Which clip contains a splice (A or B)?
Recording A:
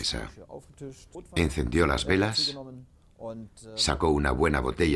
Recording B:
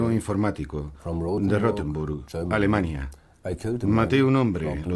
A